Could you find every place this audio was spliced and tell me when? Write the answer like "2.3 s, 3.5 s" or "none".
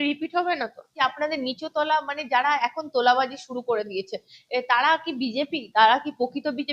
0.9 s